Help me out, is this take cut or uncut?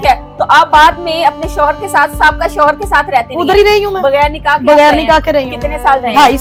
uncut